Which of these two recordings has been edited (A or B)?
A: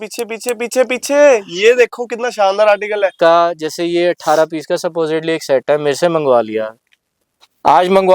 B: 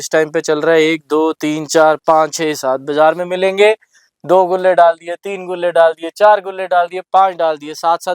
A